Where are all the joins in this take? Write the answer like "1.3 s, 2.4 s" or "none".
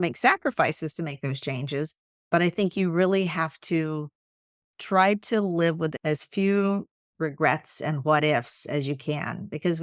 2.3 s, 5.9 s